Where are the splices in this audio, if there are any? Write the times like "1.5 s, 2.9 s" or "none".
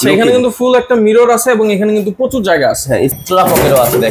3.1 s

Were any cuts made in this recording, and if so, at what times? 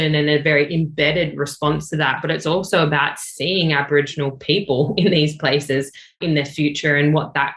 none

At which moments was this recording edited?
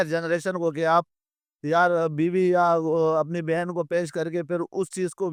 none

